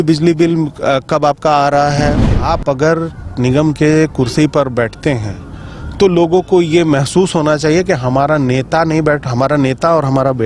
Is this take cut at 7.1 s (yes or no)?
no